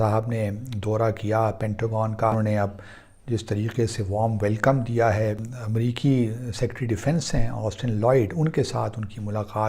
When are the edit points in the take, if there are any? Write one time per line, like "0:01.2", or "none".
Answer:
0:02.3
0:05.5